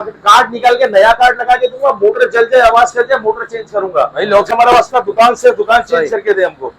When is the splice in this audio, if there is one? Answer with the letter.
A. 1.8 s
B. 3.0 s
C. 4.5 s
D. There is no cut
C